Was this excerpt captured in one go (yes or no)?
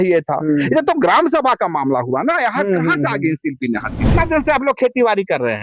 no